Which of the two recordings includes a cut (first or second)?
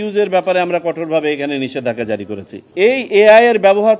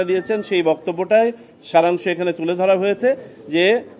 first